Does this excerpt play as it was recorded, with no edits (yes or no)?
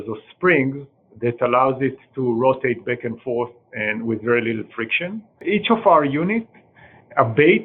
no